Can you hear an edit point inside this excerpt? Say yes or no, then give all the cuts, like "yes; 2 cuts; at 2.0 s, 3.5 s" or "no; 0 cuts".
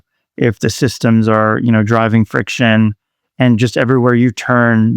no; 0 cuts